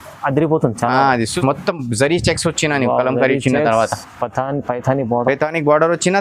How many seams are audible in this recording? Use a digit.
1